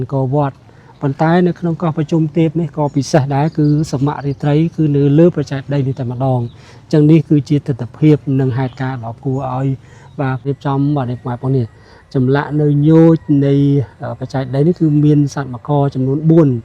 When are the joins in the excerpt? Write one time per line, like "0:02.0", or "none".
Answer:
0:10.4